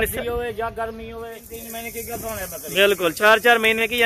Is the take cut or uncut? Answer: cut